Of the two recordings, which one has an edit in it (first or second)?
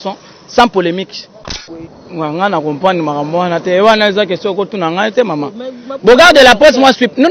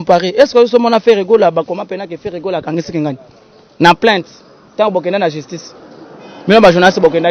first